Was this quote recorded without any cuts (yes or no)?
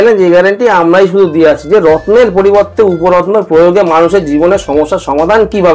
yes